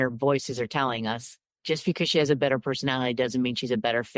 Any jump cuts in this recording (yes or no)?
yes